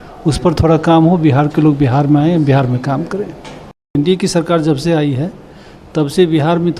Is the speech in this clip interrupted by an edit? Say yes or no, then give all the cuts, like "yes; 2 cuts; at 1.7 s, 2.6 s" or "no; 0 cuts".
yes; 1 cut; at 4.0 s